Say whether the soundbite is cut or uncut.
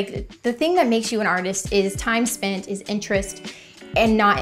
uncut